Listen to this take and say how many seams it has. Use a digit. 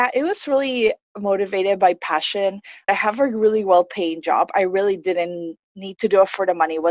1